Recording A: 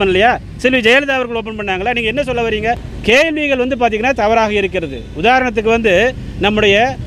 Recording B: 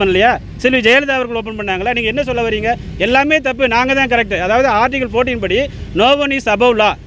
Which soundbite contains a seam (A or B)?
A